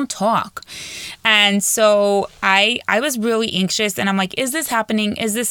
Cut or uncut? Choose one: uncut